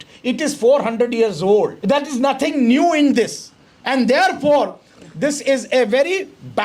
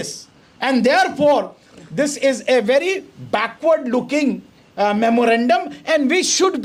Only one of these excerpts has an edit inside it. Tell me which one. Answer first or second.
first